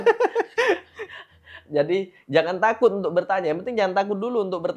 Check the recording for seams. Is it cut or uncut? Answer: uncut